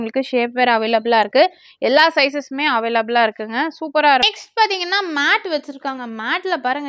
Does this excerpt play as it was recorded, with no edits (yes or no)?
no